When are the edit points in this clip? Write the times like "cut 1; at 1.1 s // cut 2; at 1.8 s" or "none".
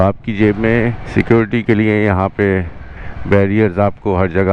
cut 1; at 1.0 s